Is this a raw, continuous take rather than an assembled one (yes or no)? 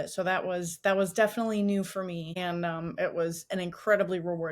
no